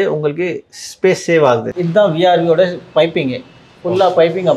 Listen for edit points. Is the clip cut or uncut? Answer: cut